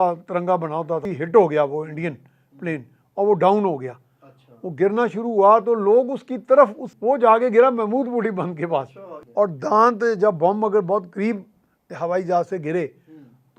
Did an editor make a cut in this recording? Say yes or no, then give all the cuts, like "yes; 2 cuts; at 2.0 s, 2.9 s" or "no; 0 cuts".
yes; 3 cuts; at 1.1 s, 6.9 s, 8.9 s